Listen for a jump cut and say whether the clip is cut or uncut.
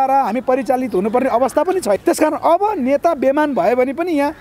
cut